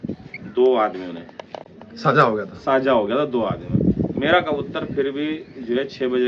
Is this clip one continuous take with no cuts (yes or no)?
yes